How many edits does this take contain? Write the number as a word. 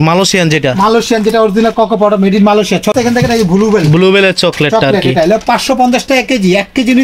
one